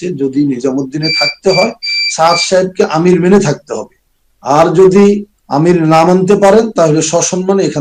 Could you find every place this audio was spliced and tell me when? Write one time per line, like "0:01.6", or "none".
none